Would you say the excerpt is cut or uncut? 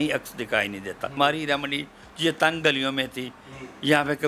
cut